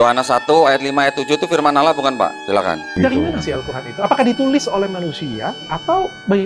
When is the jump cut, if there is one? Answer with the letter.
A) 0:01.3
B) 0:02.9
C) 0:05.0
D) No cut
B